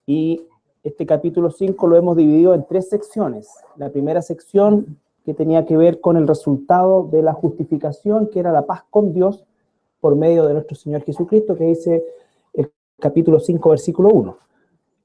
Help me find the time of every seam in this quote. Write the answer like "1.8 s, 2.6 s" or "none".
12.8 s